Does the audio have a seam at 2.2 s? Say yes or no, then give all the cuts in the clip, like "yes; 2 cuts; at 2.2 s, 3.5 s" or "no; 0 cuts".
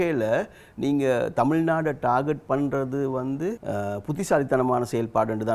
no; 1 cut; at 3.6 s